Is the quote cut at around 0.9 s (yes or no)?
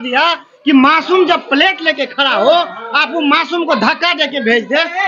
no